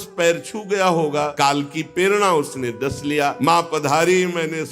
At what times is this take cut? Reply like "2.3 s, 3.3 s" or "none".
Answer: 1.3 s, 3.4 s